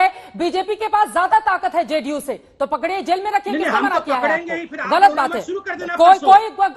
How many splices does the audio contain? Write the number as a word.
zero